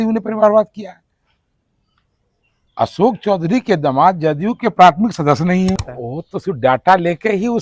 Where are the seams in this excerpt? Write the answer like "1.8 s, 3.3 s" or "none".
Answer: 5.9 s

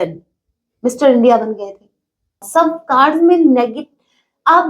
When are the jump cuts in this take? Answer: 2.4 s

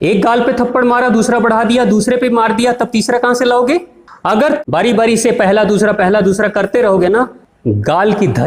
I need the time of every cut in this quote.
4.4 s, 7.5 s

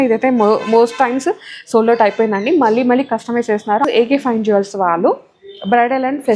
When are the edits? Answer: 3.9 s

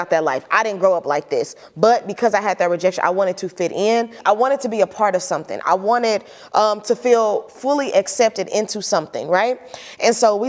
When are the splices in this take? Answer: none

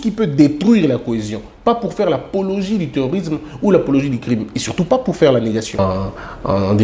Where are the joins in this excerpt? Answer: 5.8 s

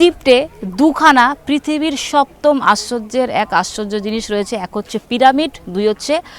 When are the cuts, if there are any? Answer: none

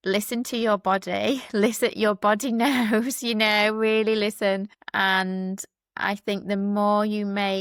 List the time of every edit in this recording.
none

